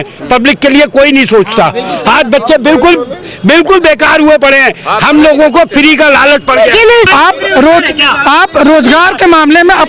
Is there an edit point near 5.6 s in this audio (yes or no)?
no